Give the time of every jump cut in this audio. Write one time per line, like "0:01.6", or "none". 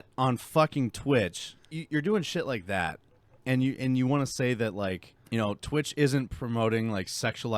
0:01.7
0:05.1